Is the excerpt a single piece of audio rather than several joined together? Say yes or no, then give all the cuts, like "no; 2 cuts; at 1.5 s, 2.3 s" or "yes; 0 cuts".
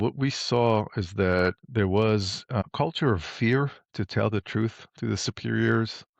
no; 2 cuts; at 1.6 s, 2.6 s